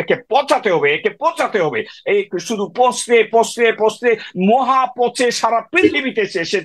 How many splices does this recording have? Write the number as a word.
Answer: zero